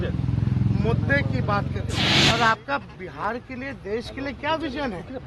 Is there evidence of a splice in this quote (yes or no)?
yes